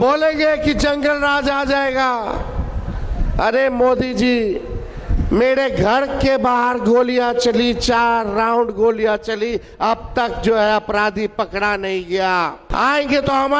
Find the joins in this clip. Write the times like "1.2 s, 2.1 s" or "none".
12.6 s